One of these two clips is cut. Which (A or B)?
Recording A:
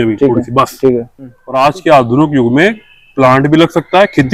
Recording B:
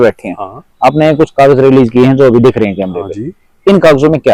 A